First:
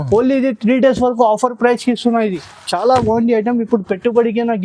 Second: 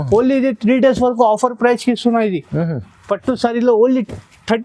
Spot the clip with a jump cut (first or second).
first